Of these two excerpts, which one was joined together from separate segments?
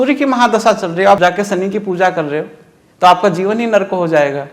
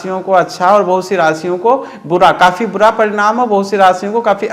first; 1 cut; at 1.2 s

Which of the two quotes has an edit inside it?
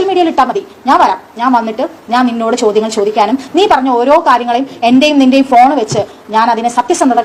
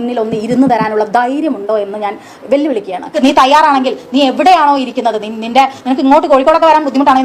second; 1 cut; at 3.2 s

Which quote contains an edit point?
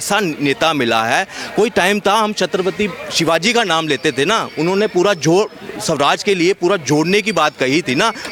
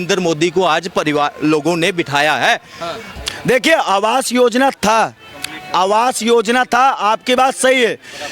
second; 1 cut; at 3.1 s

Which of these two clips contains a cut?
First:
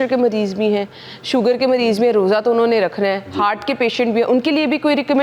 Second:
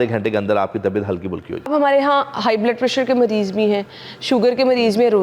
second; 1 cut; at 1.7 s

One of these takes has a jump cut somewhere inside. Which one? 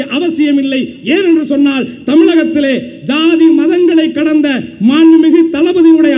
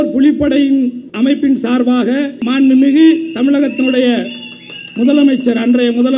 second; 2 cuts; at 1.0 s, 2.3 s

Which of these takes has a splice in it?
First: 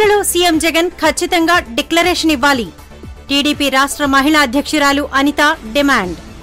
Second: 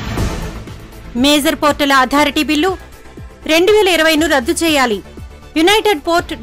second; 1 cut; at 0.9 s

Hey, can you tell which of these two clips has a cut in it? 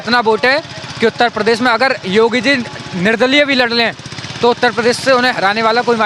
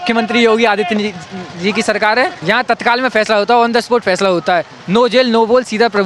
second; 1 cut; at 2.4 s

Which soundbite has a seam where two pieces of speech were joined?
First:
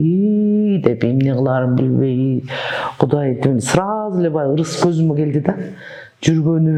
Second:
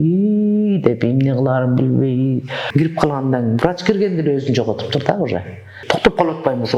second; 2 cuts; at 2.6 s, 5.7 s

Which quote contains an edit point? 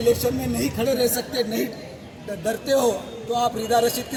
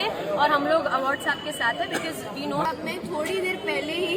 second; 1 cut; at 2.6 s

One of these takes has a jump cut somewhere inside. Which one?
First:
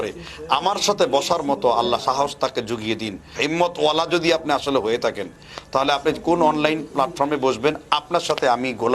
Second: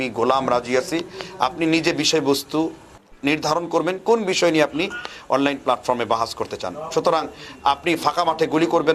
first; 1 cut; at 3.3 s

